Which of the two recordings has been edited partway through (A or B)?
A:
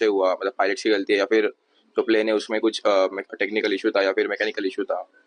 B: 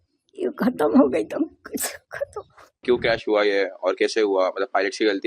B